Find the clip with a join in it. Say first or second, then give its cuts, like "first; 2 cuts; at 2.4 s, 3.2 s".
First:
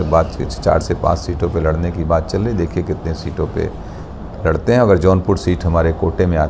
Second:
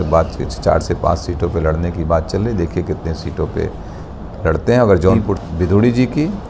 second; 1 cut; at 5.3 s